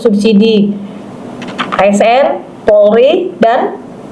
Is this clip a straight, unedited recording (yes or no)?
yes